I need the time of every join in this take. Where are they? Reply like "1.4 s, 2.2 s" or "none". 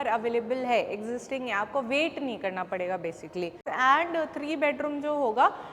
3.7 s